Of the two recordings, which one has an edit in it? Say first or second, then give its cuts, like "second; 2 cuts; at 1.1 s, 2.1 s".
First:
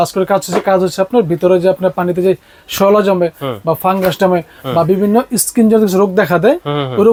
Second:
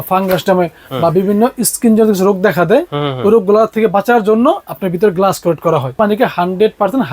second; 1 cut; at 6.0 s